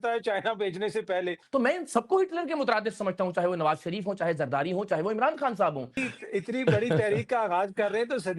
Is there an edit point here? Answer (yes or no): yes